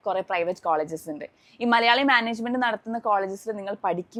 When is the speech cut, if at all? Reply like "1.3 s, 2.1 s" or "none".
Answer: none